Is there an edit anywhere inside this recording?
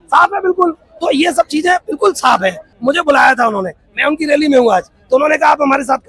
yes; 1 cut; at 2.6 s

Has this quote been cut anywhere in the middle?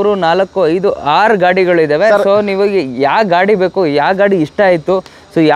no; 0 cuts

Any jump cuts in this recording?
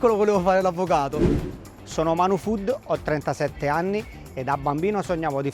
yes; 1 cut; at 1.4 s

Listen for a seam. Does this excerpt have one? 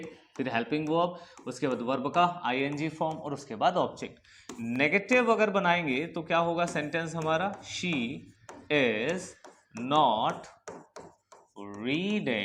no; 0 cuts

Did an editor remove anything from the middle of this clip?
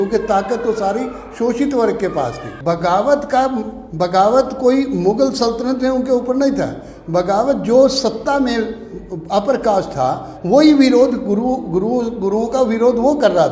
yes; 1 cut; at 2.5 s

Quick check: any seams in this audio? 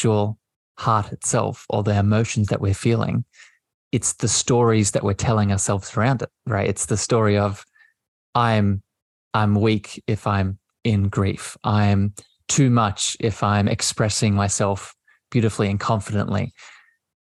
no; 0 cuts

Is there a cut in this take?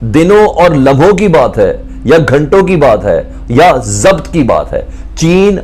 no; 0 cuts

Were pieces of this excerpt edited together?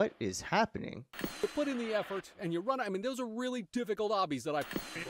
yes; 1 cut; at 1.0 s

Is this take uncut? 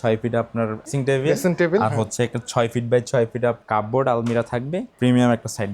no; 3 cuts; at 0.9 s, 3.6 s, 4.9 s

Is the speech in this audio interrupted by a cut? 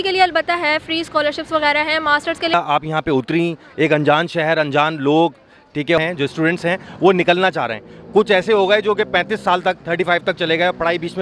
yes; 2 cuts; at 2.5 s, 6.0 s

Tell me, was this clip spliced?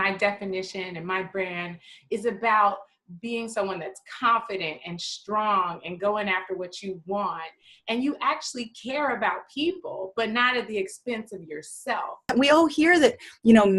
yes; 1 cut; at 12.3 s

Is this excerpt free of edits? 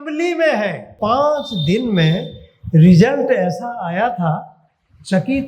no; 1 cut; at 0.9 s

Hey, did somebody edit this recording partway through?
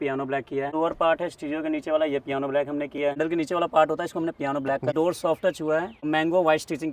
yes; 4 cuts; at 0.7 s, 3.1 s, 4.9 s, 6.1 s

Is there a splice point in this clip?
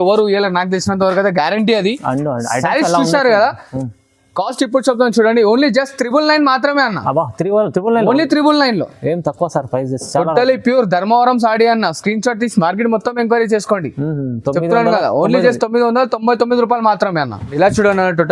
no; 0 cuts

